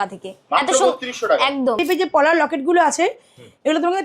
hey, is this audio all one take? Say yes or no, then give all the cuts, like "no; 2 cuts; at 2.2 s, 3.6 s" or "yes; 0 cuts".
no; 1 cut; at 1.8 s